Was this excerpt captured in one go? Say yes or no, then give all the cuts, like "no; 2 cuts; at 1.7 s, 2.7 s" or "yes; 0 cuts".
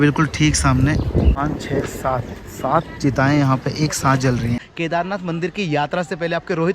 no; 2 cuts; at 1.4 s, 4.7 s